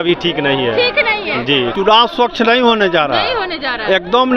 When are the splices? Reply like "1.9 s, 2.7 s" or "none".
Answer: 1.7 s